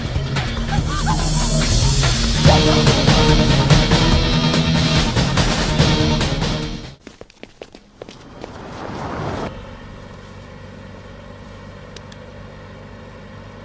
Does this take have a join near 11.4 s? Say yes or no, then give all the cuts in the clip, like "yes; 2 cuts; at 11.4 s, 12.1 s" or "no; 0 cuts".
no; 1 cut; at 9.5 s